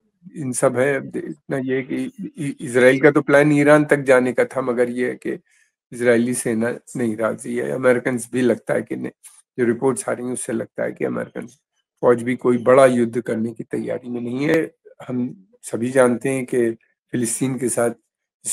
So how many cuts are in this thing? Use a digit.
1